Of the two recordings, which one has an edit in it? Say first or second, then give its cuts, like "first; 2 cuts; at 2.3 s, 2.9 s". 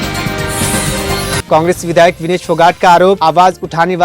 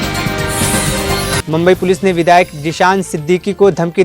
second; 1 cut; at 1.4 s